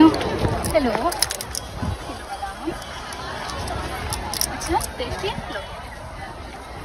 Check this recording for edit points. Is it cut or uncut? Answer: uncut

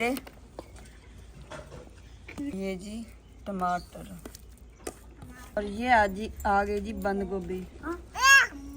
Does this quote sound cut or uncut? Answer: cut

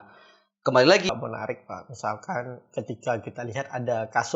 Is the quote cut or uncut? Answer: cut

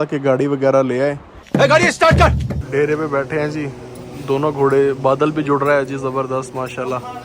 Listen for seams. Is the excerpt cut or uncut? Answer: cut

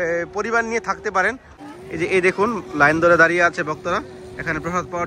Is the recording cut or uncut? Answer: cut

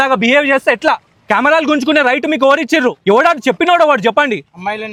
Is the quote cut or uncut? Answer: uncut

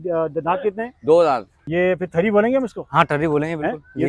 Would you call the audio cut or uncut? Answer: cut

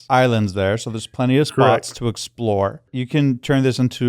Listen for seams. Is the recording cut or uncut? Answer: cut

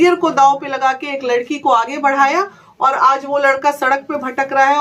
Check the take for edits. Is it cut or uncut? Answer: uncut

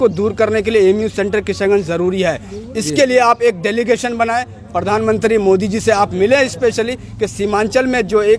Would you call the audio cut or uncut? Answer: uncut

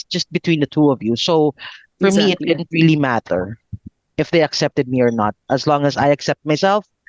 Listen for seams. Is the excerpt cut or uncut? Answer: uncut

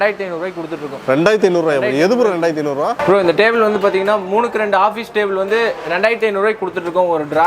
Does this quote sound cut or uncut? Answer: uncut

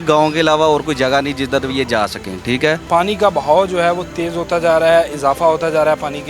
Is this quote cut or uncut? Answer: cut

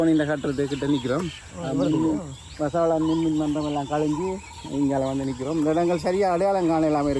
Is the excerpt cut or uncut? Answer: uncut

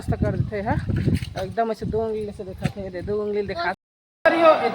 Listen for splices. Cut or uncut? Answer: cut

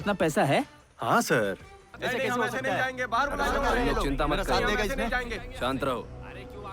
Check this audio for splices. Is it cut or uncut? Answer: cut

